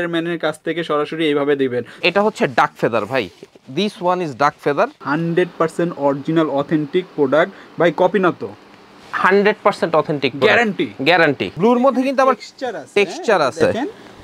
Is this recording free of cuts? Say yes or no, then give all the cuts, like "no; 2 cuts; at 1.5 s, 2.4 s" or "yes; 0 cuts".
no; 3 cuts; at 1.9 s, 5.0 s, 11.5 s